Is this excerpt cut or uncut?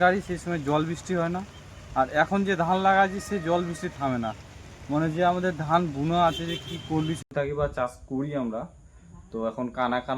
cut